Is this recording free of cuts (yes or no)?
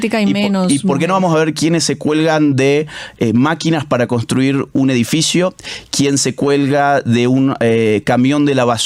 yes